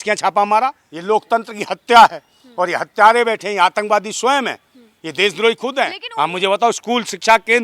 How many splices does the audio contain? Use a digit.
2